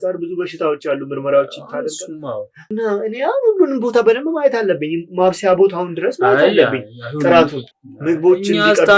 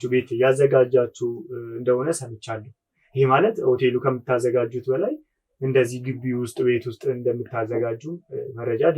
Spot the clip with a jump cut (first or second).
first